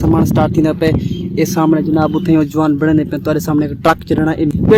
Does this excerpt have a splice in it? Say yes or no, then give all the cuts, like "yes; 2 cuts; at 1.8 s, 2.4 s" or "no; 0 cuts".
no; 0 cuts